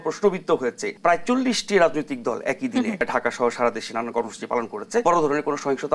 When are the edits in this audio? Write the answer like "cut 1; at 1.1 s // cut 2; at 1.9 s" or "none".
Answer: cut 1; at 0.9 s // cut 2; at 3.0 s // cut 3; at 5.0 s